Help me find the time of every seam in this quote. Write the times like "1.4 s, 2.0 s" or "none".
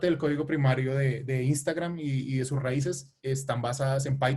none